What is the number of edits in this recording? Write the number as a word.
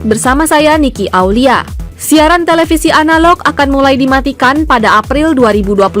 one